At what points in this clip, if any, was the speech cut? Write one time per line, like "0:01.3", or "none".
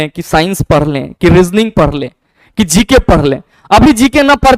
none